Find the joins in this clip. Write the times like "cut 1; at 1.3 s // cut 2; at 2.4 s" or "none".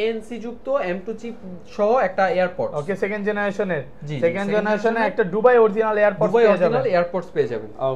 none